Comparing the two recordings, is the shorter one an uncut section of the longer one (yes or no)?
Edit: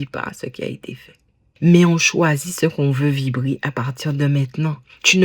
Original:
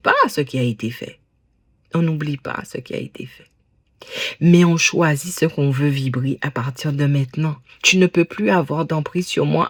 no